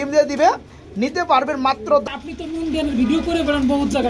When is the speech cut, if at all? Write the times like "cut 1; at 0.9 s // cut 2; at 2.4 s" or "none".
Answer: cut 1; at 2.0 s